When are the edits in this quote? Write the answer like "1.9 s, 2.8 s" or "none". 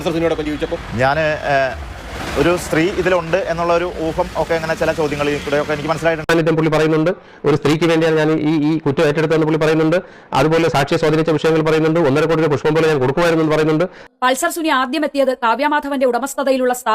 6.3 s, 14.0 s